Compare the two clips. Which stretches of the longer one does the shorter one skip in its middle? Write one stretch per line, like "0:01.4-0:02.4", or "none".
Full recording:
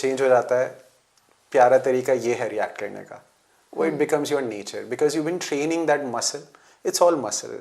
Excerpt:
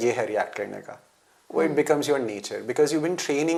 none

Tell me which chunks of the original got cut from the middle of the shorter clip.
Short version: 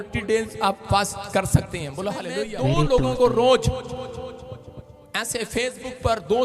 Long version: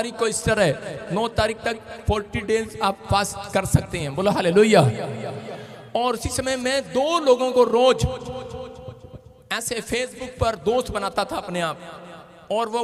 0:04.4-0:06.6

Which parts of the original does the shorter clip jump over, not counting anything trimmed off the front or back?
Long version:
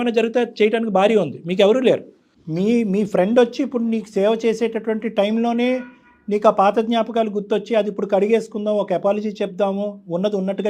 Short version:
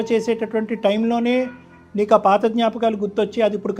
none

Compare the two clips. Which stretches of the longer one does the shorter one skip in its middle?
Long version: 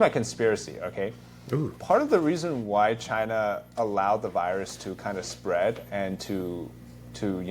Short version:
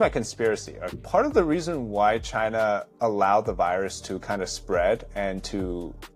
0:01.0-0:01.7

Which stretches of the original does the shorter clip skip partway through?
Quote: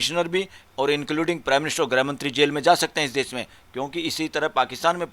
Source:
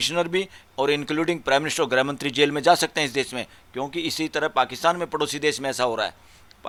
none

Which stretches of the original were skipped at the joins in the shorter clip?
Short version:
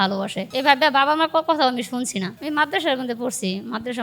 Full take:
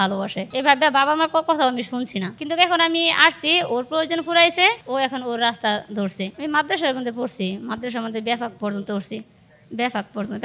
0:02.4-0:06.3

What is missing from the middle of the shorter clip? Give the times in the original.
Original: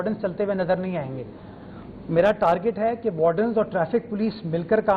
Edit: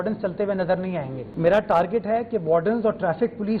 0:01.2-0:01.9

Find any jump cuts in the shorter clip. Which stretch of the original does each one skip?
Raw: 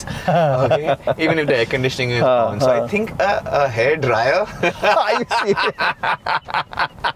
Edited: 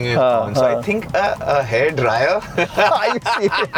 none

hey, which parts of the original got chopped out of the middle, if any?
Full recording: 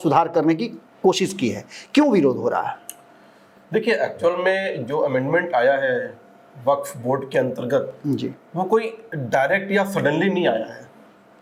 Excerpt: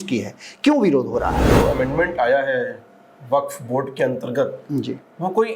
0:02.8-0:04.8

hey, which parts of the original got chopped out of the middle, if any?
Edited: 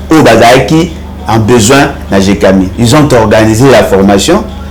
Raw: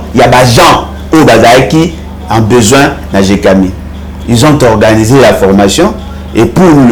0:03.7-0:04.2

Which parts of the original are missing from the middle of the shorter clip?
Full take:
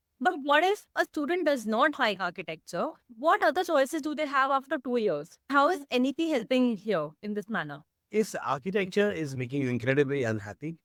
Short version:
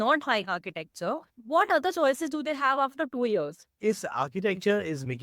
0:05.3-0:07.9

